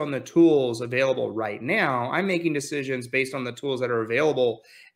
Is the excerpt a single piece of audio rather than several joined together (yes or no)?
yes